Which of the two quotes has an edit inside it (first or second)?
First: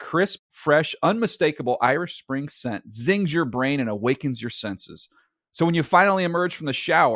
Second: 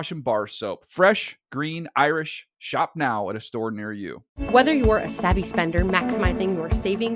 second